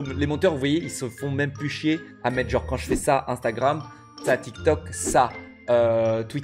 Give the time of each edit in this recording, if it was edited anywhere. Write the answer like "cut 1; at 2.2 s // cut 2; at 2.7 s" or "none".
none